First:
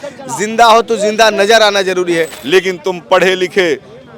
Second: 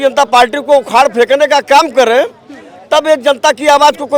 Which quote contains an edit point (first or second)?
first